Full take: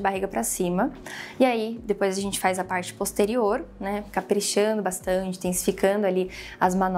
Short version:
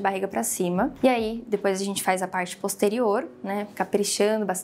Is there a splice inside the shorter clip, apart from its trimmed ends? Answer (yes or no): yes